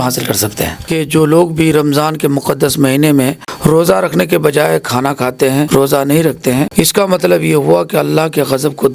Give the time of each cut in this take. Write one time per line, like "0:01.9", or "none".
0:00.9
0:03.5
0:05.7
0:06.7